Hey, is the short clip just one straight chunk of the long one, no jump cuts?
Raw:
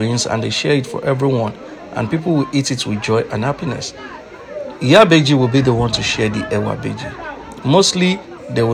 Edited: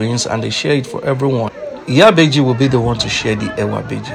no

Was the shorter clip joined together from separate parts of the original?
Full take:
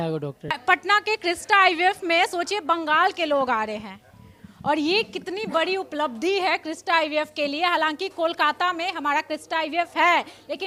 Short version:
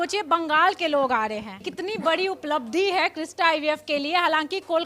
yes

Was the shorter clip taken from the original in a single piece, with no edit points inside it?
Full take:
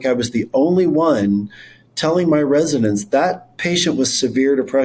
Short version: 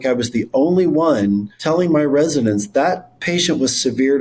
no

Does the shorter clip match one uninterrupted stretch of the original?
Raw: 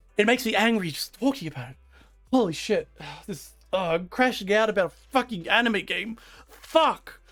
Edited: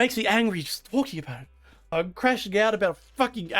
no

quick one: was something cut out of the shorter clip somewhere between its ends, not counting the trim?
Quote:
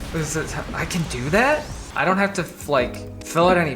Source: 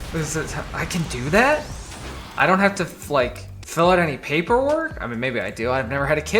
yes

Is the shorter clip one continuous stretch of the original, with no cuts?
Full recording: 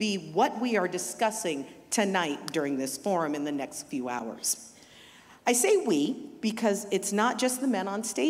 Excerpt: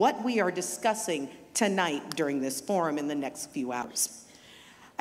no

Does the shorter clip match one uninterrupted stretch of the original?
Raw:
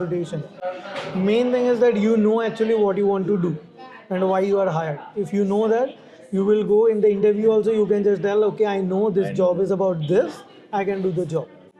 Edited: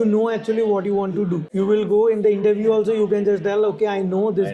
no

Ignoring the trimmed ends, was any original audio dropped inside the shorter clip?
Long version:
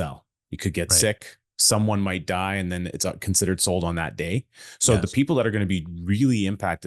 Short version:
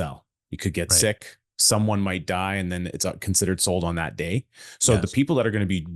no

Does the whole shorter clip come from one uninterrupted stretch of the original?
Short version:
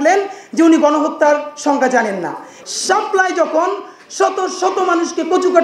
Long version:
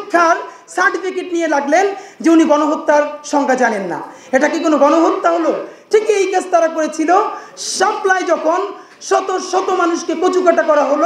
no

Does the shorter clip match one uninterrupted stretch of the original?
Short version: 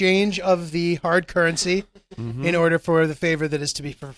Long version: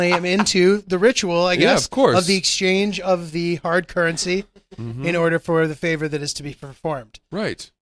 yes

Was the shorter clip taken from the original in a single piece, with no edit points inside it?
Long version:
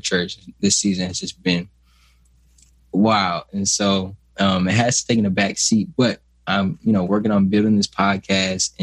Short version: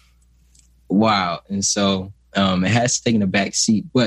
yes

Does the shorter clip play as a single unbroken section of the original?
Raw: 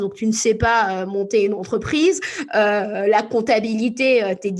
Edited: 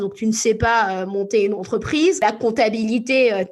no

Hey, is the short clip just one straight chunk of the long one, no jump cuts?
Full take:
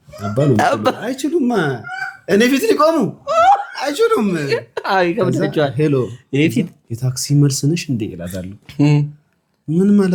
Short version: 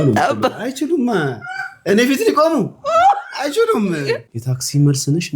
no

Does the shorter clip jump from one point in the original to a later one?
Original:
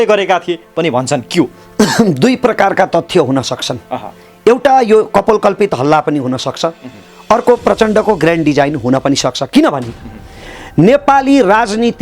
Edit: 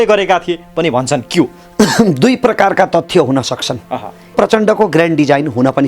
yes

